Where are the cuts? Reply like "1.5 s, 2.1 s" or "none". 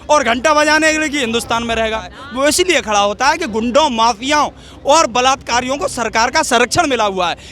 2.2 s